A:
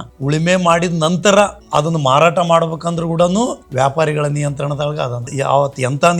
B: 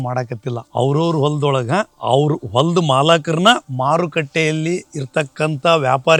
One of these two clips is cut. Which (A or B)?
A